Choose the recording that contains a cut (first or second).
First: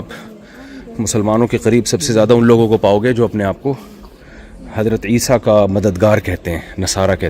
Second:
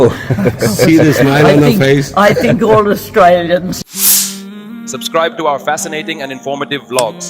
second